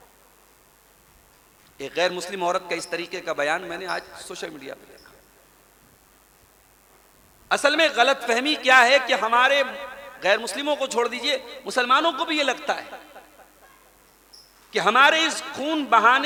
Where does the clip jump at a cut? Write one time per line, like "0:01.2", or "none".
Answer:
none

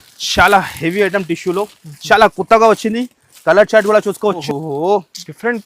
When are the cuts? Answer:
0:04.4

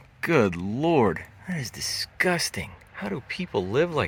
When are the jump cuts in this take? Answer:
none

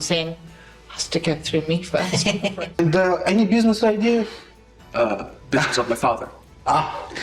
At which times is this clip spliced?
0:02.8

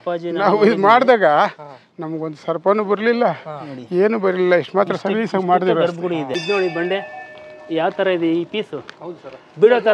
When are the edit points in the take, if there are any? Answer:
0:06.4

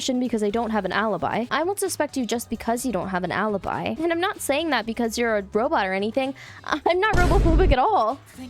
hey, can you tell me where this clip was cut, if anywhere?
0:01.5
0:04.0

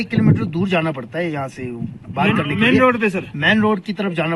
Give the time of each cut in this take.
none

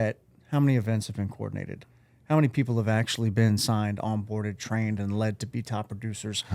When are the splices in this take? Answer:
none

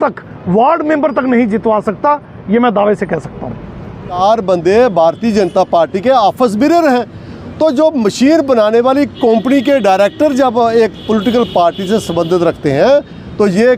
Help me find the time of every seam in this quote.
0:03.8

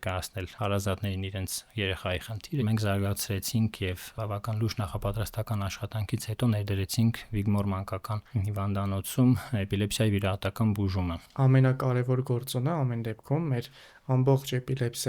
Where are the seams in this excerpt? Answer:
0:02.6
0:04.1
0:11.2

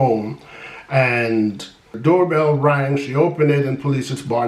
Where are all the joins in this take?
0:01.9

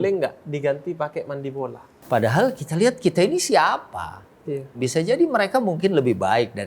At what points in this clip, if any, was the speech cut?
0:01.9
0:04.8

